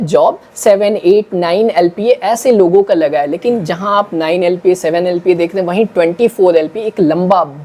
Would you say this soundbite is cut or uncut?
uncut